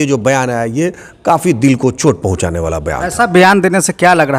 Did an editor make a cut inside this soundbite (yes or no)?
no